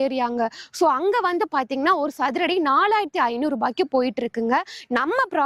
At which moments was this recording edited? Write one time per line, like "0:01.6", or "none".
none